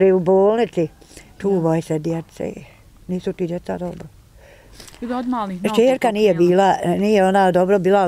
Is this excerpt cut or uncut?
cut